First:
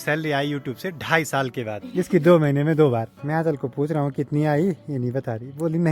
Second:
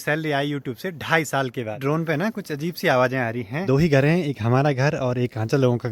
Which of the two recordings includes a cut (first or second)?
second